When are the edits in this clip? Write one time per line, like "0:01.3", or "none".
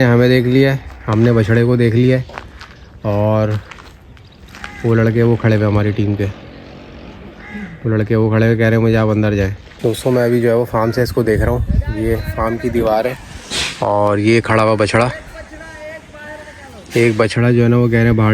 0:09.6